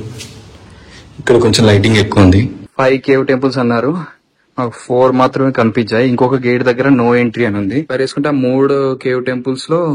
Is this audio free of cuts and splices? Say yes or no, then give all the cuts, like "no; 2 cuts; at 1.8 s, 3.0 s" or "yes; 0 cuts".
no; 2 cuts; at 2.6 s, 7.9 s